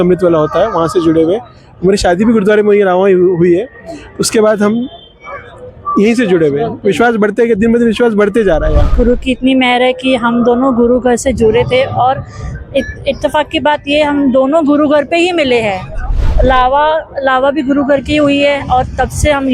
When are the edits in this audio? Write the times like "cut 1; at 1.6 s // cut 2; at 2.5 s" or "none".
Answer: cut 1; at 8.9 s // cut 2; at 16.2 s